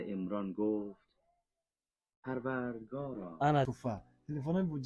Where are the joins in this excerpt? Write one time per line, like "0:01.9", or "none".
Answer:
0:03.7